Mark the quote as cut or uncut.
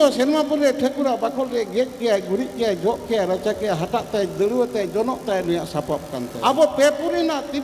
cut